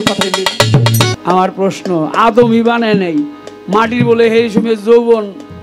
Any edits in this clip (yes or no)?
yes